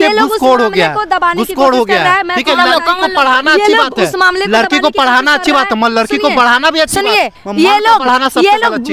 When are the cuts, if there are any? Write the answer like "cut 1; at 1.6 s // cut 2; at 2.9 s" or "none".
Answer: none